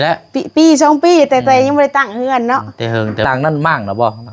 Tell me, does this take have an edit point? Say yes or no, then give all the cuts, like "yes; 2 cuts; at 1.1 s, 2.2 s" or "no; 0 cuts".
yes; 1 cut; at 3.3 s